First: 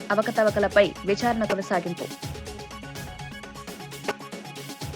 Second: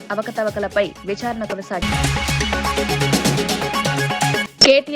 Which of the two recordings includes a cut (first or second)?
second